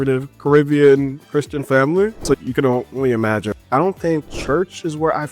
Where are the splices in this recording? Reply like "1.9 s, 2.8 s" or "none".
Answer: 2.4 s, 3.6 s, 4.3 s